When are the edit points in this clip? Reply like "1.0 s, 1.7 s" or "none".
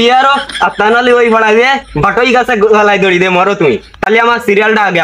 none